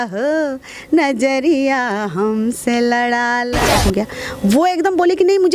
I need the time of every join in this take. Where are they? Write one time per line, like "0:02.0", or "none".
0:03.7